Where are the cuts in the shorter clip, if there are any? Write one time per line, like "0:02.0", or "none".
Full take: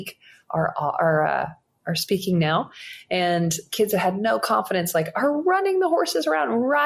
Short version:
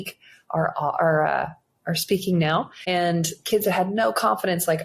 0:02.8